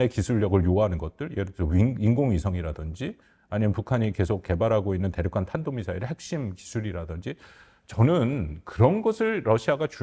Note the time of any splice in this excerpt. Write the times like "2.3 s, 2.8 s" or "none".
none